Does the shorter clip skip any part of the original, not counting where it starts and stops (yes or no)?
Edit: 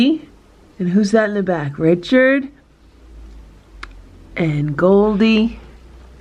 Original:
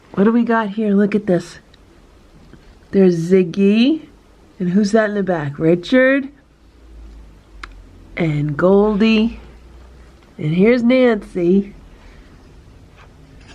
no